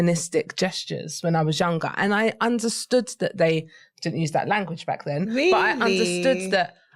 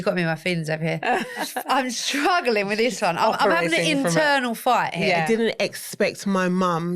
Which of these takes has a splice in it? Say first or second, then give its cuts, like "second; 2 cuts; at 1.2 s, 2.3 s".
second; 2 cuts; at 1.5 s, 5.2 s